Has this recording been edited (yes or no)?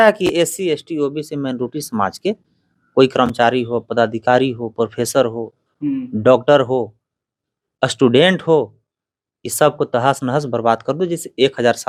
no